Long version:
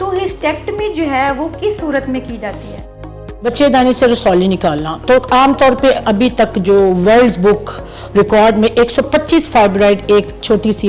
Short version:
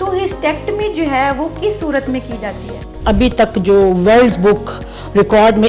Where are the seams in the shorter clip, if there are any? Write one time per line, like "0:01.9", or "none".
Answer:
0:03.0